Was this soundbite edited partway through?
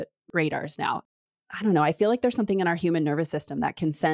yes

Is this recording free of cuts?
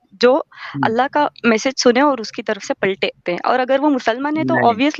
no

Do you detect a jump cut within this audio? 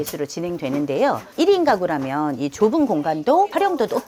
no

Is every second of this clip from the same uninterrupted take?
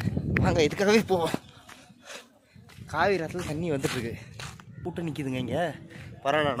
no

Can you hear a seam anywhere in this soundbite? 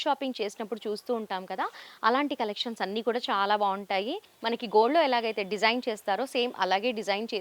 yes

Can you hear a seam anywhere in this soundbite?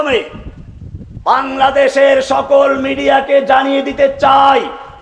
no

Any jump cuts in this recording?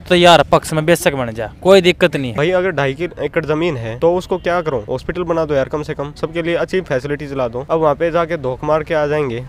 yes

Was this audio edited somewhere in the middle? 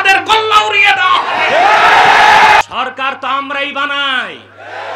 yes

